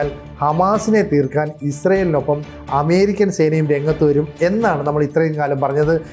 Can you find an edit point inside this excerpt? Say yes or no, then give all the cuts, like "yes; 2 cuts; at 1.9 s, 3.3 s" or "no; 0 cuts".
no; 0 cuts